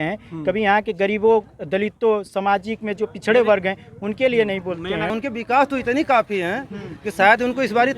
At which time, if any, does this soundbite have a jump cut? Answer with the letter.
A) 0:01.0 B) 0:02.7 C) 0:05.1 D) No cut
C